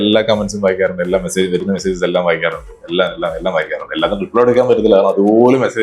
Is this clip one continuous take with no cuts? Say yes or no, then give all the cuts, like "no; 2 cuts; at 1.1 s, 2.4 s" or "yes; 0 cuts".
yes; 0 cuts